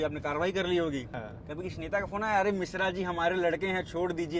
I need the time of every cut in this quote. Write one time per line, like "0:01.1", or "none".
none